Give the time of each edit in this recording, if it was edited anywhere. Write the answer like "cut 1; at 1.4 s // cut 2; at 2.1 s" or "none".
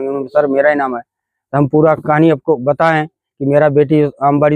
none